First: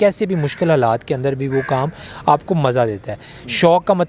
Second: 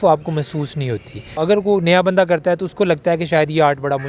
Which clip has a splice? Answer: second; 1 cut; at 1.3 s

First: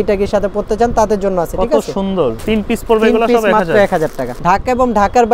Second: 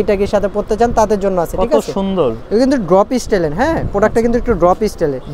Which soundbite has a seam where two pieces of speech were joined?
first; 2 cuts; at 2.4 s, 4.3 s

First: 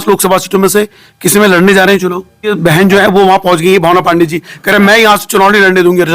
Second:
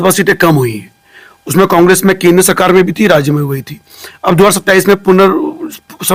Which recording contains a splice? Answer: first; 1 cut; at 2.5 s

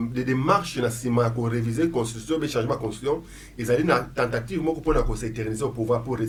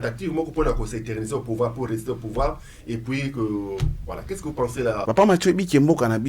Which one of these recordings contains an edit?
second; 1 cut; at 5.0 s

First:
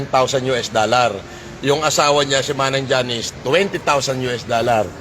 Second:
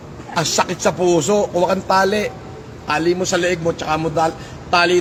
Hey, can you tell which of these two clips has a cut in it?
first; 1 cut; at 3.3 s

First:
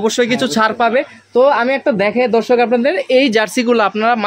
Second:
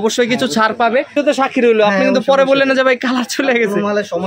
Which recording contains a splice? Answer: second; 1 cut; at 1.1 s

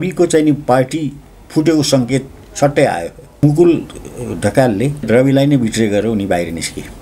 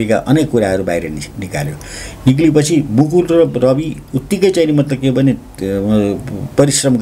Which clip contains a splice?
first; 2 cuts; at 3.4 s, 5.1 s

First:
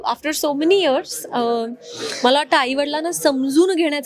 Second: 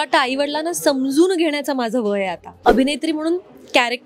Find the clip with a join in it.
second; 1 cut; at 2.6 s

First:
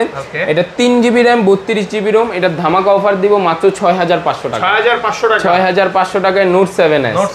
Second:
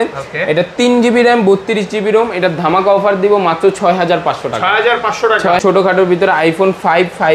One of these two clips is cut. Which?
second; 1 cut; at 5.6 s

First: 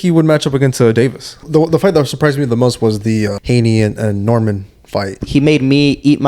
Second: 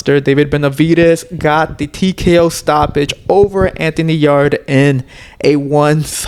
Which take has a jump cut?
first; 3 cuts; at 1.4 s, 3.4 s, 5.2 s

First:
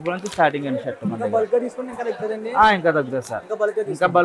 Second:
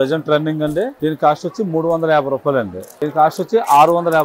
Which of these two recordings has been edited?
second; 2 cuts; at 0.9 s, 2.9 s

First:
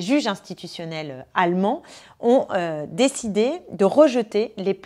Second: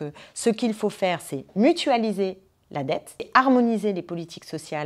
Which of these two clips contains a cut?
second; 1 cut; at 3.3 s

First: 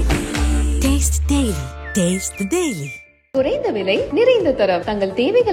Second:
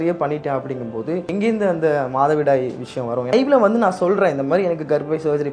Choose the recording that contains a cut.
second; 2 cuts; at 1.3 s, 3.3 s

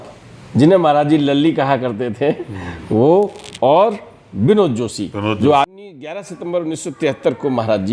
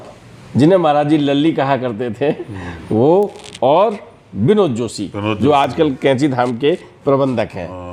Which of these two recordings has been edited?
first; 1 cut; at 5.7 s

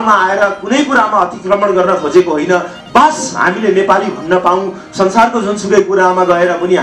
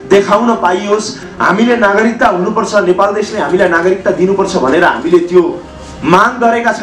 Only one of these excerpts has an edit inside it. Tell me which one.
second; 1 cut; at 1.2 s

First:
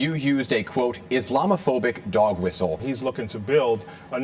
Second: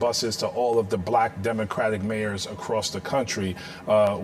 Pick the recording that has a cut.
first; 1 cut; at 2.8 s

